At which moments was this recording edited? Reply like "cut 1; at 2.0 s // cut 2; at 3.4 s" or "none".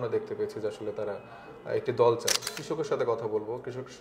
cut 1; at 2.4 s